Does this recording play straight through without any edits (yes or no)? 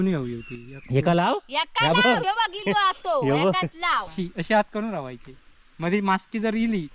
no